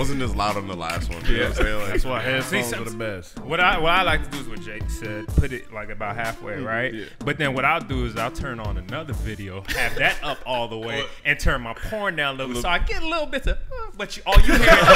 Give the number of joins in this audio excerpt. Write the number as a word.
zero